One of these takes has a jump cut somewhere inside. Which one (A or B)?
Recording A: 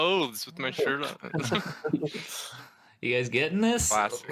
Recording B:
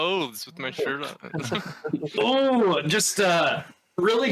B